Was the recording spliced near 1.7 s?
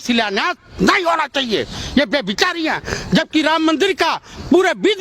no; 0 cuts

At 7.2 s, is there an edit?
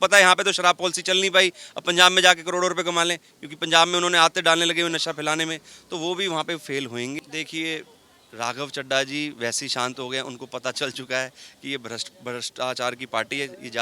yes; 1 cut; at 7.2 s

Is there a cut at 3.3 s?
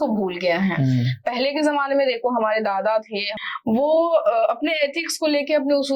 yes; 1 cut; at 3.3 s

